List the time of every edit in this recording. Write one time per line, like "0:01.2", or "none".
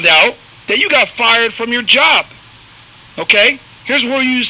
none